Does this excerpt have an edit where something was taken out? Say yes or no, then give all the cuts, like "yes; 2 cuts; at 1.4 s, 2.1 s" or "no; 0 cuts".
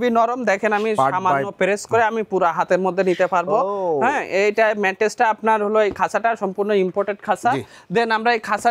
no; 0 cuts